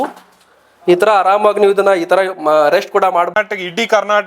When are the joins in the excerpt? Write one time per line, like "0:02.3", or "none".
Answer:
0:03.3